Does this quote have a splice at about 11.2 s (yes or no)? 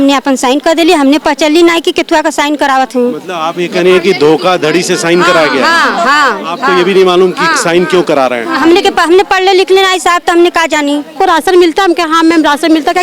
yes